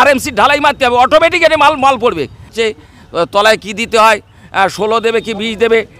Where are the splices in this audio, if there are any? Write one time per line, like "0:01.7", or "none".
0:02.5